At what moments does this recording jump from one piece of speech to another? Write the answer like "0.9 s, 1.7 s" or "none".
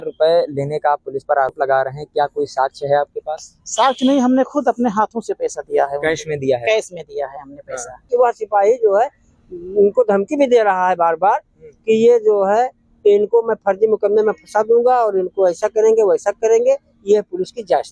1.5 s, 8.1 s

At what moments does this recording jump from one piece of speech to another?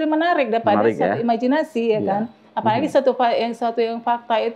none

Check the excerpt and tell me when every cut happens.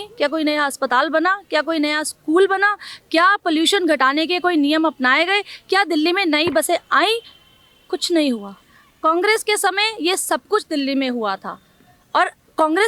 none

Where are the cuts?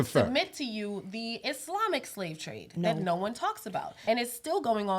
3.9 s

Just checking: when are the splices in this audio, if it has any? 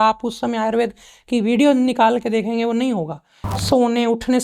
3.5 s

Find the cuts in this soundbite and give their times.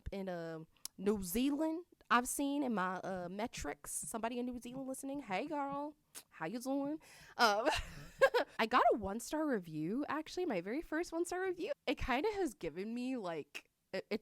8.5 s, 11.8 s

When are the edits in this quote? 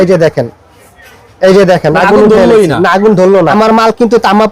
3.5 s

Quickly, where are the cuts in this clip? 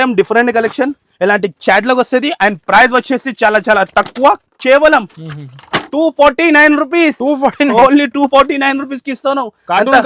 none

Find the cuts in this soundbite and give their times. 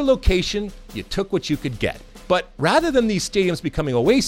2.1 s

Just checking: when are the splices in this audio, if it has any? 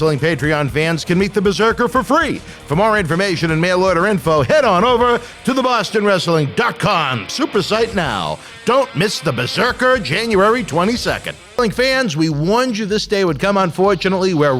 11.4 s

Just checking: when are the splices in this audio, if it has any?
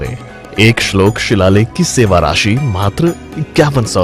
none

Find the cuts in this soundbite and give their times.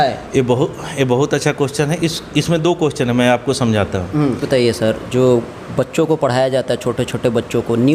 4.4 s

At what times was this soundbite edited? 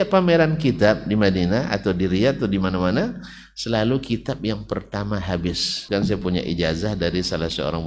5.7 s

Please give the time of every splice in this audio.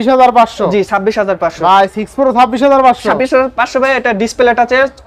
none

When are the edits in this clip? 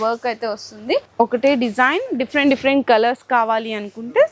1.1 s

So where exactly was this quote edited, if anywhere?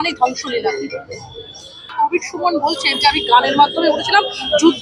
1.8 s

